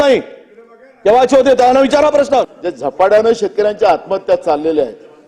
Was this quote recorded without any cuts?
no; 1 cut; at 2.5 s

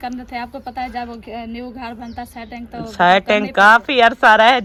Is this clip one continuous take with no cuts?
yes; 0 cuts

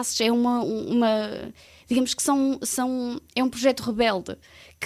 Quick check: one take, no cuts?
yes; 0 cuts

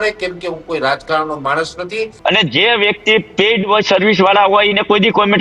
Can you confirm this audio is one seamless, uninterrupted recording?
no; 1 cut; at 2.1 s

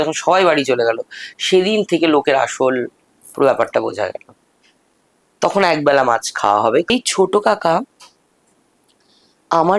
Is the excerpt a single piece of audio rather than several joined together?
no; 1 cut; at 6.9 s

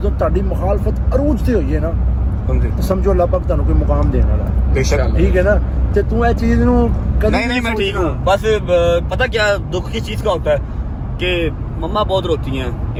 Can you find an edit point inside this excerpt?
no; 0 cuts

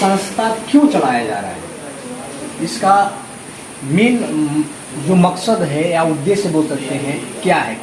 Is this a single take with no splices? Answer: yes; 0 cuts

